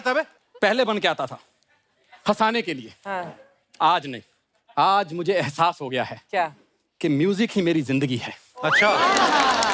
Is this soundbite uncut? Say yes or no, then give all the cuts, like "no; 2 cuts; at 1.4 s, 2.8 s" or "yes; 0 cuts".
yes; 0 cuts